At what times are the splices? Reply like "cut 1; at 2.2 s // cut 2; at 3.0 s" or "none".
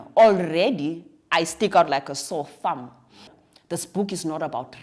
cut 1; at 3.4 s